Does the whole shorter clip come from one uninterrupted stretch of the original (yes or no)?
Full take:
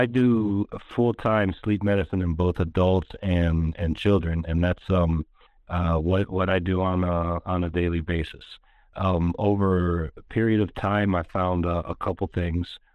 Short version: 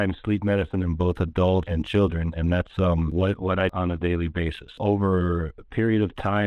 no